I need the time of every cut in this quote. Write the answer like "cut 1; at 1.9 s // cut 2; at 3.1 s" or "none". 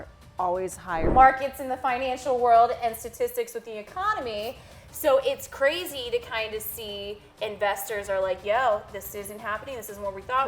cut 1; at 1.1 s